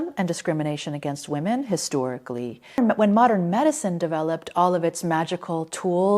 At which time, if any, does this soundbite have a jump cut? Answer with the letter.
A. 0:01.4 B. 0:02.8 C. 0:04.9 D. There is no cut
B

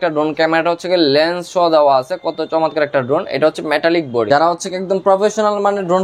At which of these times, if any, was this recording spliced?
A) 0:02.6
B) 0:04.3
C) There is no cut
B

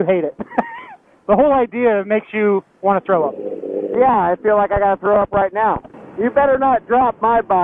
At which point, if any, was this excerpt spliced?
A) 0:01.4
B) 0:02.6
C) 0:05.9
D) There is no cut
C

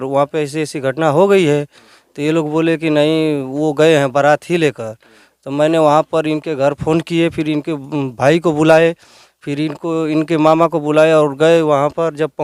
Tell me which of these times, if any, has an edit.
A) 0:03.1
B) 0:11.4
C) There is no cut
C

